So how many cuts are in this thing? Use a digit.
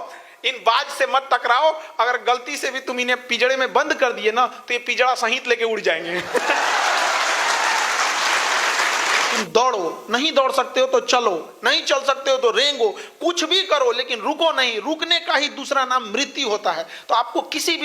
1